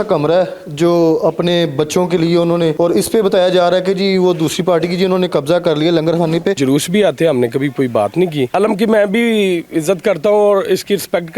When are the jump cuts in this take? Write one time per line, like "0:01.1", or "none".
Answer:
0:02.7
0:06.6
0:08.5